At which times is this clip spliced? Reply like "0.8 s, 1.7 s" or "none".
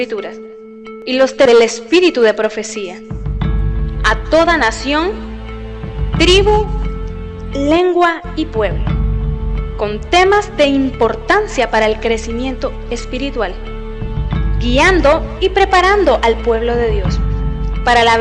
1.2 s